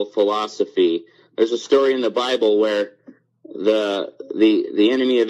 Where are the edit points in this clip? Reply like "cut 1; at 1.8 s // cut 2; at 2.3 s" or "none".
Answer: none